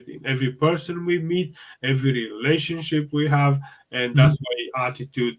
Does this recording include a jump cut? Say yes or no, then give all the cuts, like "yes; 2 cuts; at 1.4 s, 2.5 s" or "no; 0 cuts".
no; 0 cuts